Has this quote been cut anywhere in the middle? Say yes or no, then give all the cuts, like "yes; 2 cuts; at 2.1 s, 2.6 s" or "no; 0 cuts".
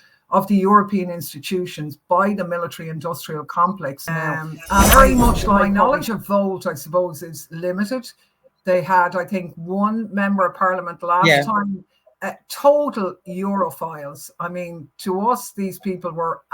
yes; 1 cut; at 5.6 s